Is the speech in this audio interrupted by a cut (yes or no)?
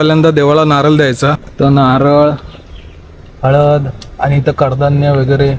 yes